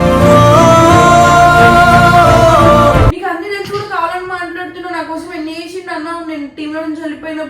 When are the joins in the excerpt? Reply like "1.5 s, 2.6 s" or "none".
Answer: 3.1 s